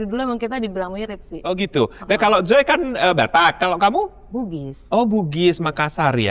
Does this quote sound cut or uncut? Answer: uncut